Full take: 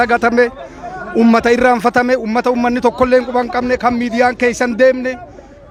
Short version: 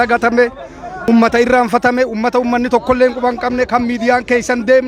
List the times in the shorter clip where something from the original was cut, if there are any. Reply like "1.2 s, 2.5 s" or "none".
1.1 s